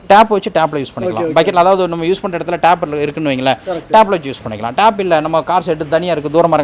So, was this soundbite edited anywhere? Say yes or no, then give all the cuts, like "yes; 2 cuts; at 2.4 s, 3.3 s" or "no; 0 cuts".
no; 0 cuts